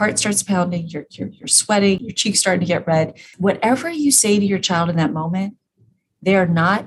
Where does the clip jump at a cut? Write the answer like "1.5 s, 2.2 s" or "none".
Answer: 2.0 s, 3.2 s